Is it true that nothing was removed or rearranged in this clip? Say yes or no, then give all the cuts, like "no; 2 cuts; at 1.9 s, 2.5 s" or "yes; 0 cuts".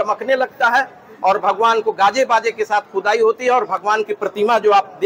yes; 0 cuts